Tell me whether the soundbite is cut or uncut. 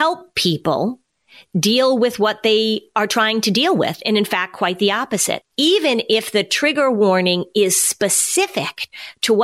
uncut